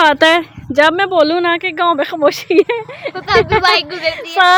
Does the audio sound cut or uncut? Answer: uncut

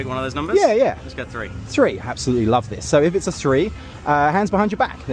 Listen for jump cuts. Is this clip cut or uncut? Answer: cut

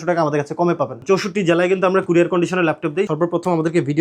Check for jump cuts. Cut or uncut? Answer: cut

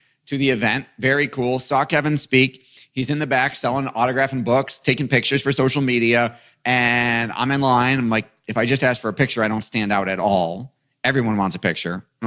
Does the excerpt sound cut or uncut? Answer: uncut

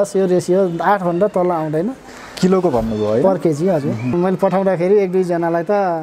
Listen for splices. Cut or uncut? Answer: cut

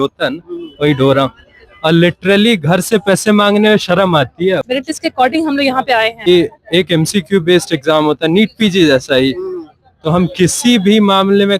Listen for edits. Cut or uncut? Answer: cut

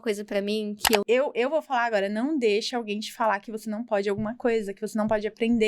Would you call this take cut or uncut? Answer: cut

